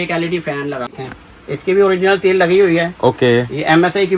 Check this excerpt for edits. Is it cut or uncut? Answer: cut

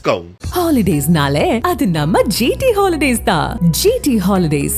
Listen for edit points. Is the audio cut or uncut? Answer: uncut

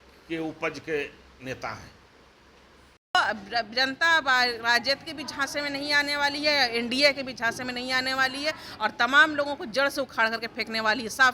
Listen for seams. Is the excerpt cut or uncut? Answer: cut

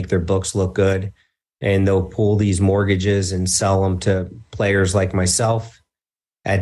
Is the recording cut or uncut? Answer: uncut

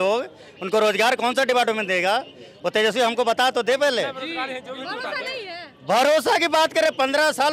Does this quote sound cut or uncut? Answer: uncut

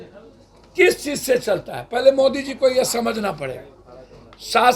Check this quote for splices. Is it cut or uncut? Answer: uncut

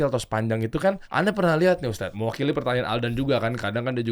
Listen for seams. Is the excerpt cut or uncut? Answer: cut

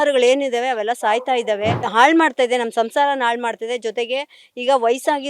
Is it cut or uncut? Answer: cut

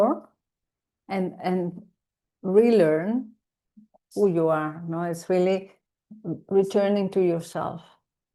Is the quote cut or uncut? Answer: uncut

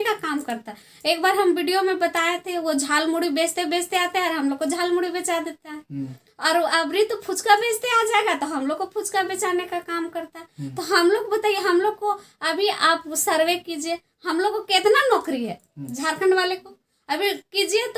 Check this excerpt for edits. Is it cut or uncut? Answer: uncut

